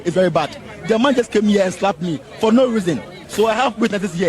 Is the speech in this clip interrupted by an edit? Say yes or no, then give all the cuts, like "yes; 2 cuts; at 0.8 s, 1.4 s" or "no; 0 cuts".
yes; 1 cut; at 3.2 s